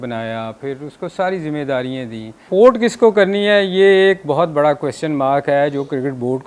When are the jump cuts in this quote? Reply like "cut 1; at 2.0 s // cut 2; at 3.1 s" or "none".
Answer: cut 1; at 2.4 s